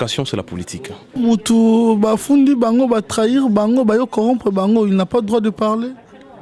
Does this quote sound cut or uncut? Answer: cut